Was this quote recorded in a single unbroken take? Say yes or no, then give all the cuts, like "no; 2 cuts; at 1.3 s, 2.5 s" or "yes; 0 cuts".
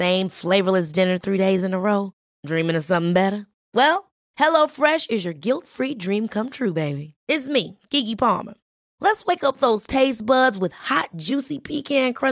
yes; 0 cuts